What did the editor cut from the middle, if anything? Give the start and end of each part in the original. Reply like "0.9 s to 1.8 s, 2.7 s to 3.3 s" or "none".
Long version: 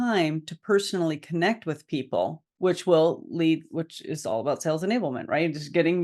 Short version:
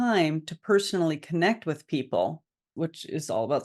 2.6 s to 3.6 s